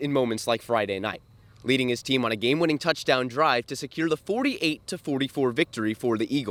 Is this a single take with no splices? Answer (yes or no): yes